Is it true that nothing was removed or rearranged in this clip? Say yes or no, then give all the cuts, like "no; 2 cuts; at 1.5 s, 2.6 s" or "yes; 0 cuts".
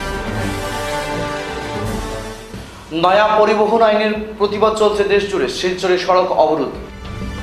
yes; 0 cuts